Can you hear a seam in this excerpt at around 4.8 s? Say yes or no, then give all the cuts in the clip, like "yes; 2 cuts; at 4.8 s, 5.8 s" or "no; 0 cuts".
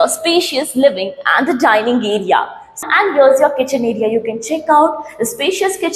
no; 1 cut; at 2.9 s